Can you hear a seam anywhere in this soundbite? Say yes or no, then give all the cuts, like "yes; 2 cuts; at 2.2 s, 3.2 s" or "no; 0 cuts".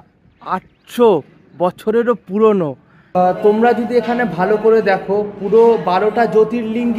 yes; 1 cut; at 3.1 s